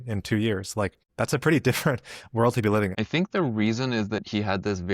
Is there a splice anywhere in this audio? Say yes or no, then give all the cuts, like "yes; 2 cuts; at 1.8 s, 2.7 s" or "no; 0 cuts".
yes; 2 cuts; at 1.0 s, 2.9 s